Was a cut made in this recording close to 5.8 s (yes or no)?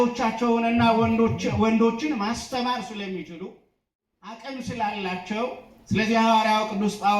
no